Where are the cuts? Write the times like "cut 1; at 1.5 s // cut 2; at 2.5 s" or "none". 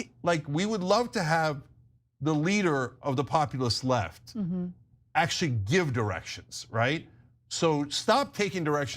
cut 1; at 7.1 s

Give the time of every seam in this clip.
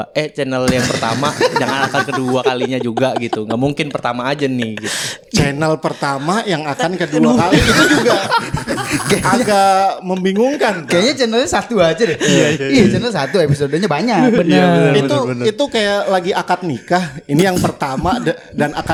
none

